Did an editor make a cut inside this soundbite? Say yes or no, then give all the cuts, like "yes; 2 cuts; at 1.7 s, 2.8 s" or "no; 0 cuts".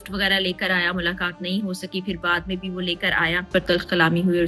yes; 1 cut; at 3.4 s